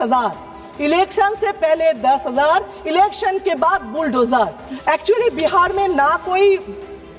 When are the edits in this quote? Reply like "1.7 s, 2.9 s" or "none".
4.6 s